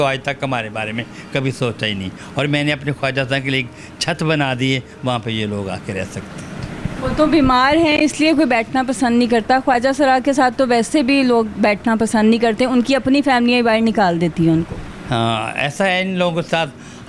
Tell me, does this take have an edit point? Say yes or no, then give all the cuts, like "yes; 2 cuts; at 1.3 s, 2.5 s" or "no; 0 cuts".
no; 0 cuts